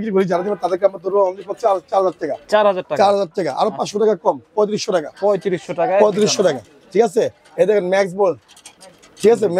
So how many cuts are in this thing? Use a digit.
0